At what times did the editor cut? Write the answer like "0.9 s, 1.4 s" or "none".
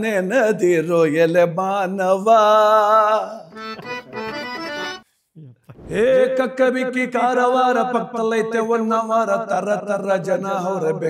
5.1 s